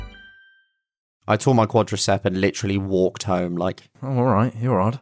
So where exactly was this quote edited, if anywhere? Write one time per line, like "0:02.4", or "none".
0:01.4
0:03.9